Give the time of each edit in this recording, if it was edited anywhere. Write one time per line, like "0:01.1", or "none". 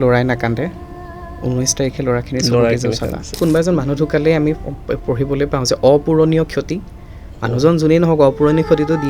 0:03.4